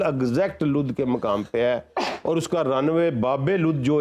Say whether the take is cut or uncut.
uncut